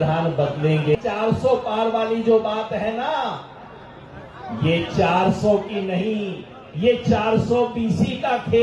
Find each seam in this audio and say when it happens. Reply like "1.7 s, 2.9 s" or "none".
0.9 s